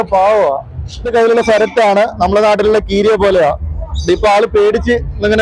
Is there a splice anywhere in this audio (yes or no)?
yes